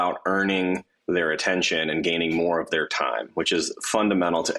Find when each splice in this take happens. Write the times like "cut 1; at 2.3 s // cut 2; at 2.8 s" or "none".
none